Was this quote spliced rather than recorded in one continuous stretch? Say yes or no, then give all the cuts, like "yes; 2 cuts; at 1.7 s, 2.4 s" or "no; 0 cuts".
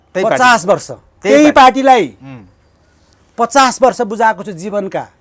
no; 0 cuts